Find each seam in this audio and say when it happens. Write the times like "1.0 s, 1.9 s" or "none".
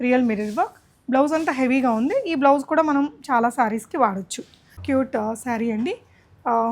4.8 s